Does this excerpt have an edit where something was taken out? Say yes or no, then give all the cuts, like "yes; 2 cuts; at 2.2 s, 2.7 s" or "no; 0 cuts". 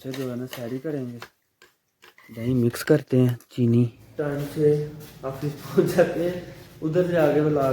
yes; 1 cut; at 4.0 s